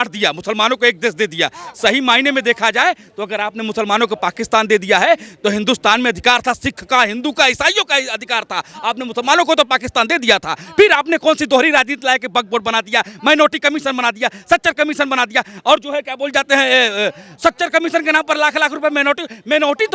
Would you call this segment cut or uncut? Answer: uncut